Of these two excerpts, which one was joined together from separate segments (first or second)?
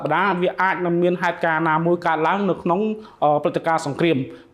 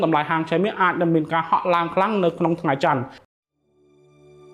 second